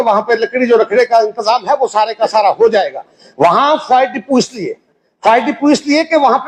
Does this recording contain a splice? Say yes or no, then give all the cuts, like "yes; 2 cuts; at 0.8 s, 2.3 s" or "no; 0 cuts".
no; 0 cuts